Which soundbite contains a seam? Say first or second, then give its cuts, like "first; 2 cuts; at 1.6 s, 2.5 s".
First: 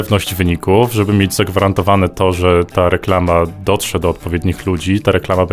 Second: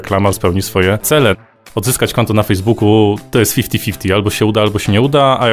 second; 2 cuts; at 1.5 s, 3.2 s